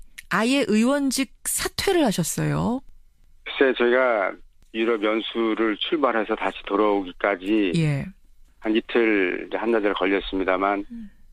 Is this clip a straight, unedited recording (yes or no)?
no